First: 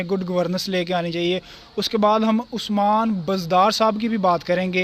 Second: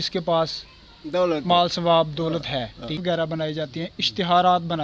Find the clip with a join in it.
second; 1 cut; at 3.0 s

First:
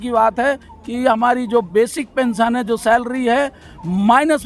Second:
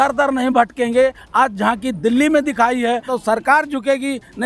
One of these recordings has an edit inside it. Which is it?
second; 1 cut; at 3.1 s

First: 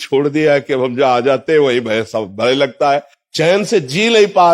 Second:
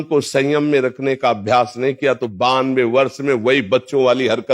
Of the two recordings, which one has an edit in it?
first; 1 cut; at 3.2 s

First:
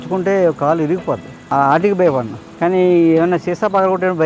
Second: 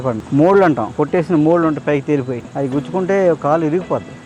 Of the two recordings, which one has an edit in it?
second; 1 cut; at 0.9 s

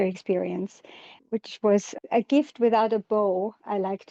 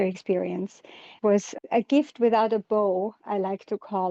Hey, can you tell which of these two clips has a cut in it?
second; 1 cut; at 1.1 s

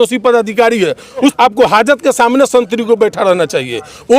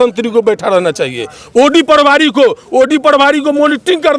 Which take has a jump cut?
first; 1 cut; at 1.3 s

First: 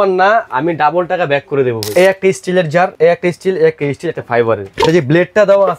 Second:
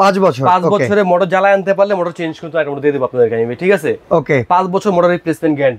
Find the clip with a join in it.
first; 3 cuts; at 1.8 s, 2.9 s, 4.7 s

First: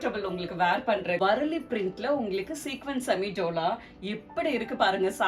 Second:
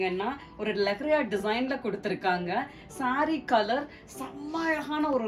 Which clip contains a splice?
first; 1 cut; at 1.2 s

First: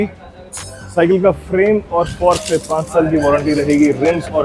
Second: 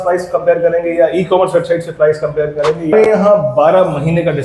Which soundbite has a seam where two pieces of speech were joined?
second; 1 cut; at 2.9 s

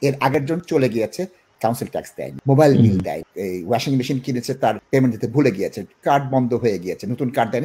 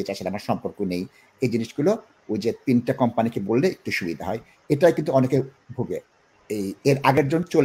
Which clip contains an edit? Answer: first; 3 cuts; at 1.8 s, 3.3 s, 4.8 s

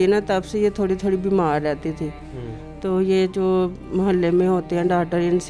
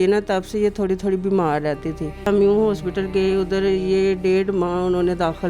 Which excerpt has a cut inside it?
second; 1 cut; at 2.3 s

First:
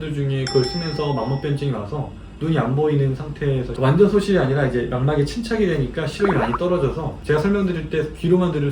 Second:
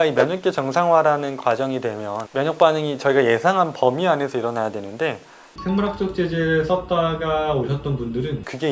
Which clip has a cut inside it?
first; 1 cut; at 3.7 s

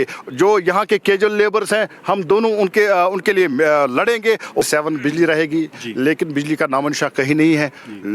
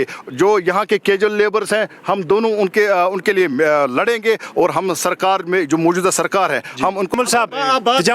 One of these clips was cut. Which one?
first; 1 cut; at 4.6 s

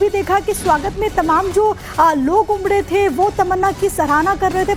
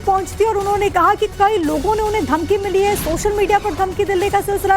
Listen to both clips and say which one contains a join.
second; 1 cut; at 1.0 s

